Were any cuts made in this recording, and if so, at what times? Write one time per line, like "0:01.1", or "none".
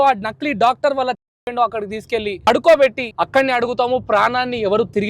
0:02.5
0:03.0